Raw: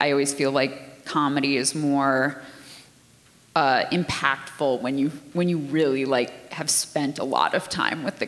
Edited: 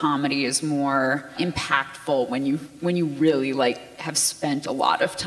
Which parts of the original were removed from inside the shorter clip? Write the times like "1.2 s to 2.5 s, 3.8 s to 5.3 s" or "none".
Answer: 2.5 s to 3.9 s

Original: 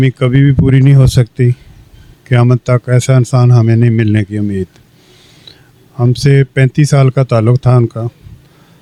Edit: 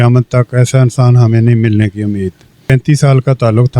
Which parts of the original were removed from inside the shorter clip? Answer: 5.0 s to 6.5 s

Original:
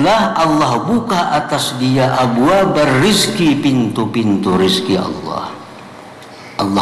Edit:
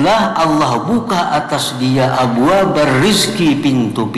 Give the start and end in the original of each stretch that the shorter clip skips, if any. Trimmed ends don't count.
none

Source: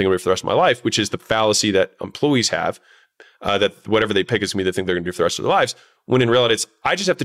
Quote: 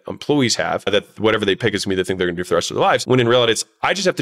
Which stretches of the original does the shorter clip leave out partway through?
2.8 s to 3.6 s, 5.7 s to 6.0 s

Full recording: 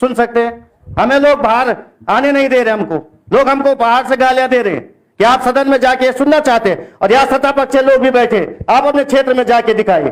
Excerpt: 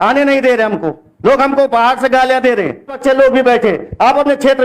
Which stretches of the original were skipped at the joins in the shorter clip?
5.0 s to 7.6 s

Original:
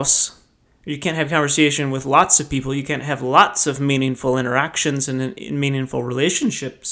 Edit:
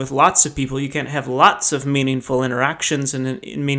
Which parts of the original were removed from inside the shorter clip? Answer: none

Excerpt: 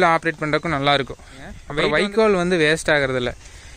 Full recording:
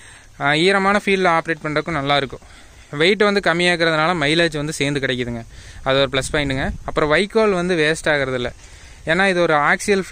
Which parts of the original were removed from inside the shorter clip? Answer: 2.9 s to 6.8 s

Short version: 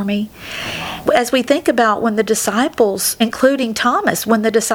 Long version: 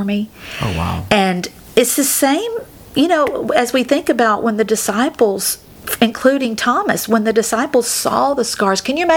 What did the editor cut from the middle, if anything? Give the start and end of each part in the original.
1.0 s to 3.4 s, 5.5 s to 5.9 s

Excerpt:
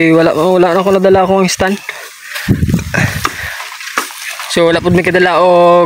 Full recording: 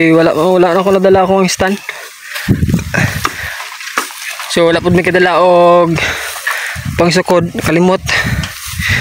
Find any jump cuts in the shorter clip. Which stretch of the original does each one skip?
none

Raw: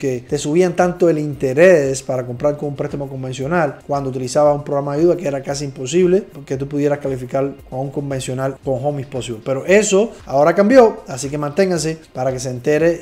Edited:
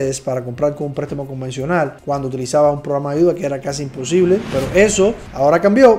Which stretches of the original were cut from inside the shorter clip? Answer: 6.3 s to 9.4 s

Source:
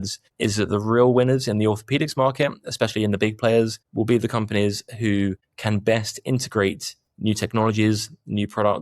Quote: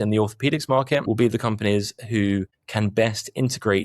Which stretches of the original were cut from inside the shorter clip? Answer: 2.5 s to 3.9 s

